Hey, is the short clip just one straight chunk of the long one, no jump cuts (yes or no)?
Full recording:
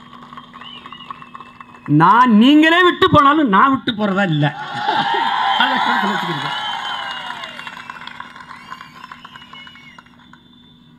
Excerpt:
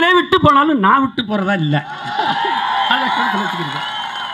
yes